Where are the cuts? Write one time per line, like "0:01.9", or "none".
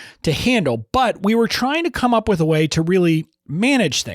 none